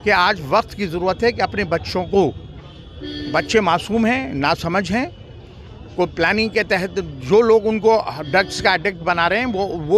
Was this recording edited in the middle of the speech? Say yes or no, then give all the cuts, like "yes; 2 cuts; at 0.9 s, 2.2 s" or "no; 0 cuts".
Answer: no; 0 cuts